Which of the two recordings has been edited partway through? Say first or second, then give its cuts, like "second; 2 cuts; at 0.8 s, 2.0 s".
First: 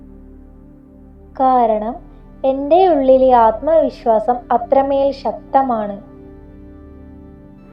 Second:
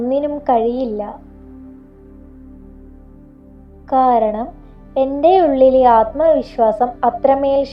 first; 1 cut; at 6.6 s